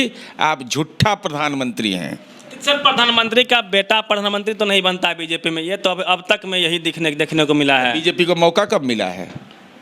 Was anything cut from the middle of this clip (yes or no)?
no